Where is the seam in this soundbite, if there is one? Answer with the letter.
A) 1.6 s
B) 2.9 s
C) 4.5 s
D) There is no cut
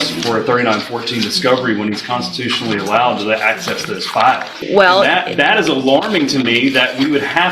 C